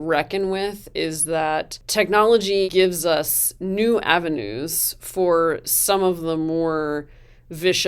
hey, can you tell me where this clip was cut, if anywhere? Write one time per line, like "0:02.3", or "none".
0:01.8
0:02.6